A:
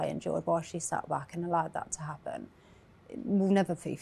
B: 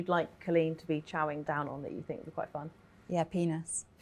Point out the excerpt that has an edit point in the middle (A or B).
B